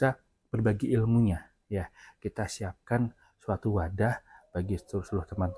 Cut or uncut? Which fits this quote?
uncut